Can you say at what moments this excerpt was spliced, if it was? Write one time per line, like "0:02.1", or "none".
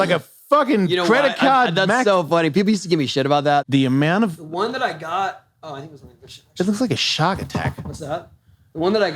0:03.6